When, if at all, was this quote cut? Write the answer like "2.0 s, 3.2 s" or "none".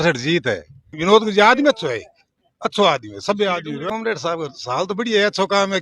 1.0 s, 3.8 s

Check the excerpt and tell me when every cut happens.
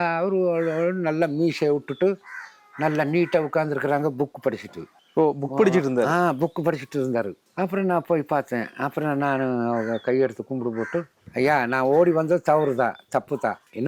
none

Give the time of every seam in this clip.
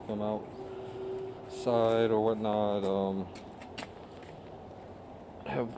3.0 s

